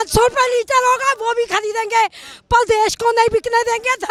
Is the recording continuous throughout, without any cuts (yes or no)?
yes